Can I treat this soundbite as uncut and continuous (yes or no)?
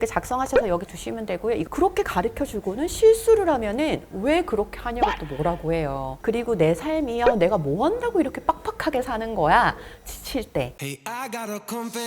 no